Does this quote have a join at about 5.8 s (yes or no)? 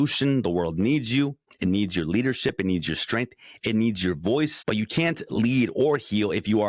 no